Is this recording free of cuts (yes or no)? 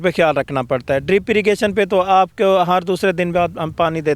yes